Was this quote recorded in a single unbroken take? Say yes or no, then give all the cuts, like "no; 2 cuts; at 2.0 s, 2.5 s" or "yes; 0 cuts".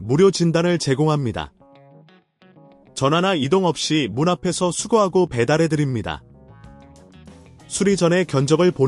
yes; 0 cuts